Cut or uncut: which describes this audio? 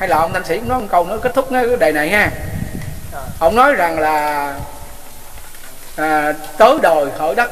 uncut